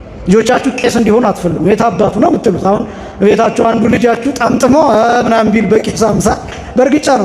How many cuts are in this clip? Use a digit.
0